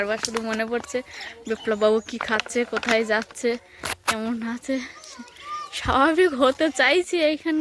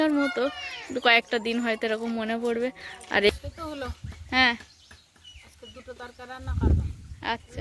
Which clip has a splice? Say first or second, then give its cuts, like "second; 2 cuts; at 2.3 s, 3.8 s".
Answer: second; 1 cut; at 3.3 s